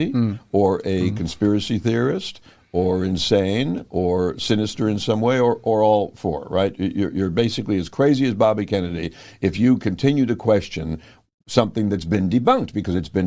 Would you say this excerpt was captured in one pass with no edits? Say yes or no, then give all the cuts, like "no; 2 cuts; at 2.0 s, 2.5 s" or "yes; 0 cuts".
yes; 0 cuts